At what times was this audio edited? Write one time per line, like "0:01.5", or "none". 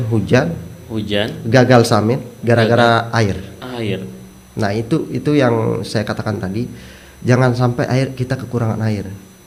none

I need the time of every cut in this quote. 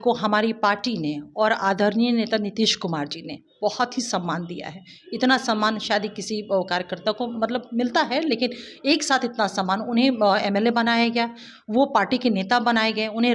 none

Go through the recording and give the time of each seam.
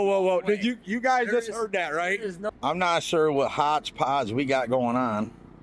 0:02.4

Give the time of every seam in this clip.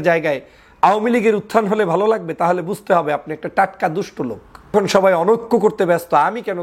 0:04.7

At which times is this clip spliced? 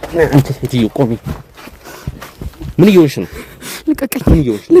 none

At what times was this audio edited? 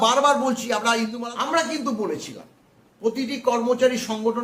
0:01.2

